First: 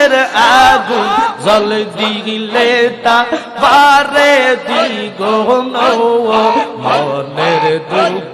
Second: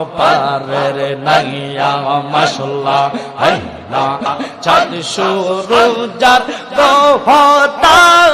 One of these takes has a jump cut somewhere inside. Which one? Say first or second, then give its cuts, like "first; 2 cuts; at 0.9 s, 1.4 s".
second; 1 cut; at 4.3 s